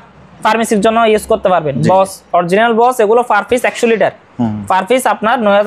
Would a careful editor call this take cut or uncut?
uncut